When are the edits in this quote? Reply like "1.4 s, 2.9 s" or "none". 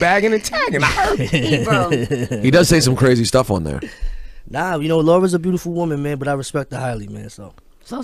5.0 s